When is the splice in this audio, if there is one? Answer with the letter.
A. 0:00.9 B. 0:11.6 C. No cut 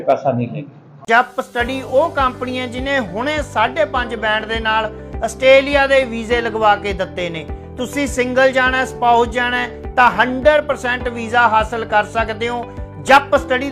A